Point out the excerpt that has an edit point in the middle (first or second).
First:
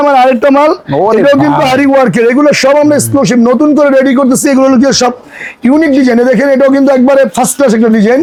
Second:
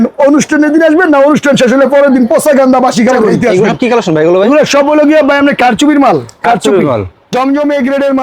second